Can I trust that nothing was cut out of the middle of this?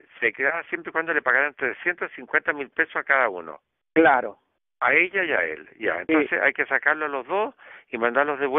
yes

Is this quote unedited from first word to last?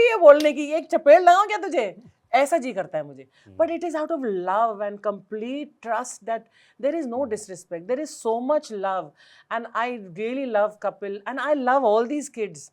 yes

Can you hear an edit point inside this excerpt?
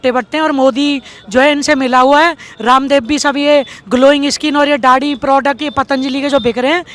no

